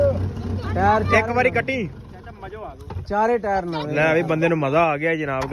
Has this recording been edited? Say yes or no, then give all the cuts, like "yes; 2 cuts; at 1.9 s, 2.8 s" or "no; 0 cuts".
no; 0 cuts